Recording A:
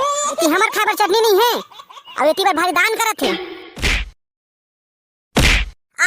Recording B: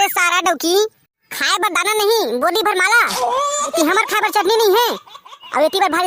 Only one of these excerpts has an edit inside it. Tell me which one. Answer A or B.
A